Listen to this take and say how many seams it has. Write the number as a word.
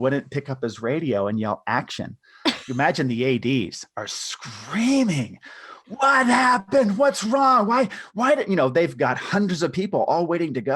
one